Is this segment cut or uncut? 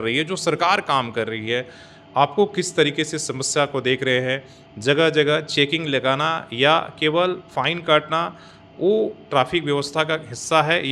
uncut